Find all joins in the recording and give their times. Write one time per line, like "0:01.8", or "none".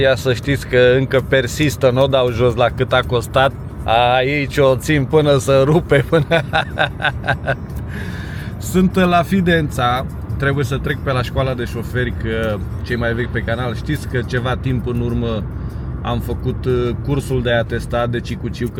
none